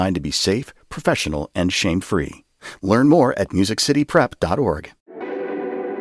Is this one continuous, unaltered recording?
no; 1 cut; at 5.1 s

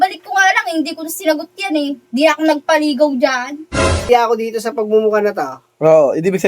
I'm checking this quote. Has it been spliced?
yes; 1 cut; at 4.1 s

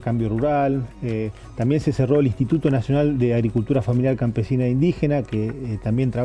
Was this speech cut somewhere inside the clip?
no; 0 cuts

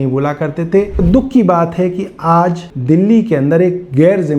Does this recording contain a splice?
yes; 2 cuts; at 1.0 s, 2.7 s

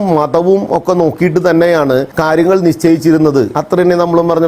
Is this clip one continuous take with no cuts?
no; 2 cuts; at 2.1 s, 3.5 s

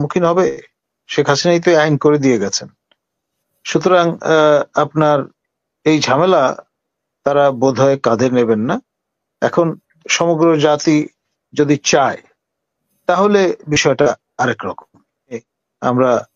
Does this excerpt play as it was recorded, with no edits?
no; 1 cut; at 15.4 s

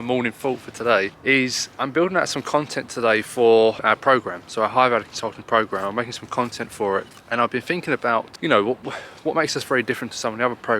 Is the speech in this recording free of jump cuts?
no; 4 cuts; at 1.1 s, 3.8 s, 7.2 s, 8.3 s

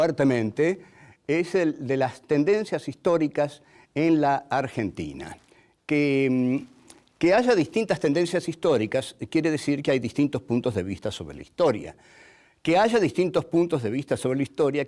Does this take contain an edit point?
yes; 1 cut; at 7.2 s

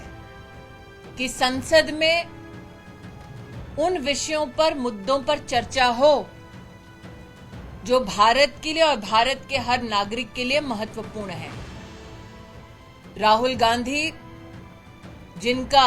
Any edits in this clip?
yes; 2 cuts; at 2.4 s, 3.8 s

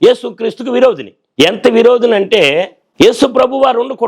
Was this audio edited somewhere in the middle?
yes; 2 cuts; at 1.2 s, 2.8 s

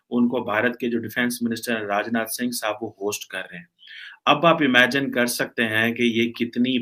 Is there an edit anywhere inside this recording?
no; 0 cuts

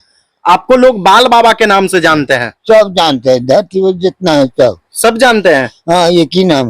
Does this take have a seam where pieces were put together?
no; 0 cuts

